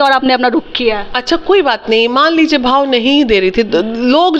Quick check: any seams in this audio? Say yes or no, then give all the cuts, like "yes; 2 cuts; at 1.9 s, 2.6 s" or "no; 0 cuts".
no; 0 cuts